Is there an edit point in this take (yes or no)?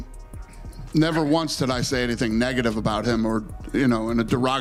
no